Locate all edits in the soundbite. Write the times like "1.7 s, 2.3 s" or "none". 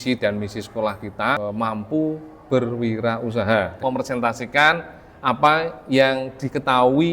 1.4 s, 3.7 s